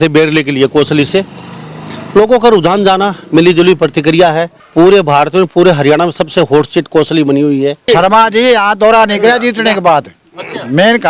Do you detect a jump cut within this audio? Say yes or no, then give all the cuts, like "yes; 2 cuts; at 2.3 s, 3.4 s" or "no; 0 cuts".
yes; 2 cuts; at 4.5 s, 7.8 s